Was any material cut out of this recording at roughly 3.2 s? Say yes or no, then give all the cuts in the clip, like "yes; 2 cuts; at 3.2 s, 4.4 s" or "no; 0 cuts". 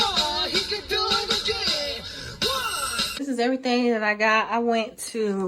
yes; 1 cut; at 3.2 s